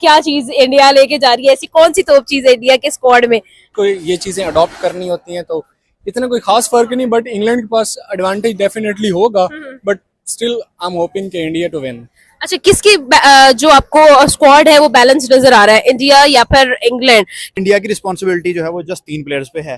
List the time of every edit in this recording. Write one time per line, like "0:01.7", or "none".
0:03.7
0:17.4